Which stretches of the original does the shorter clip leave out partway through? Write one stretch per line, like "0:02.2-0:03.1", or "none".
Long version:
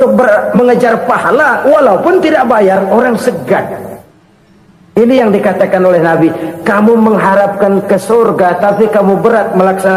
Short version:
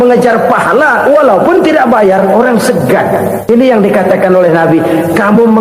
0:04.1-0:05.0